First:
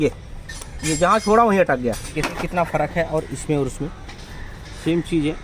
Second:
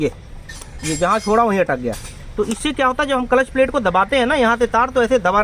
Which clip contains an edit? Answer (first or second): first